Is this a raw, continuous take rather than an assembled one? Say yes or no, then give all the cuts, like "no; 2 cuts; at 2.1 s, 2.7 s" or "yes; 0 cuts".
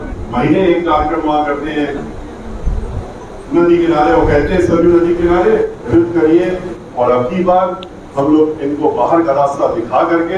no; 1 cut; at 5.9 s